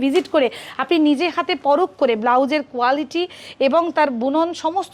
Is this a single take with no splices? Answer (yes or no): yes